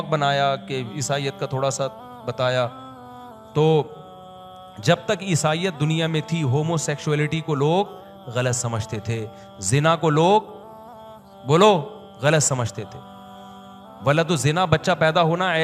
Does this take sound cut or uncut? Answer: uncut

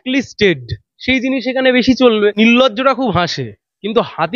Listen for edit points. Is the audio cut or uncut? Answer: cut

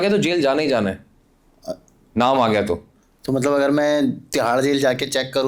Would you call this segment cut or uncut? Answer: uncut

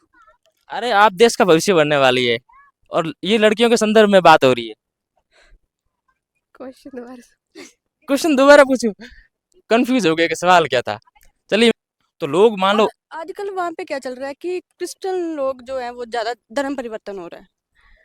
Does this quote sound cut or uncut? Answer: cut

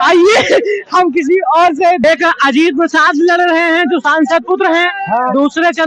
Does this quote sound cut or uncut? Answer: cut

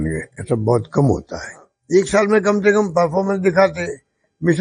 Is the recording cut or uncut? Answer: cut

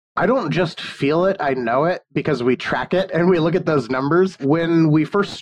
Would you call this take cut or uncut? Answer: cut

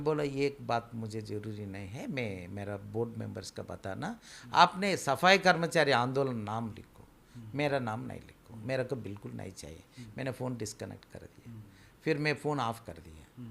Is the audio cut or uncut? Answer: uncut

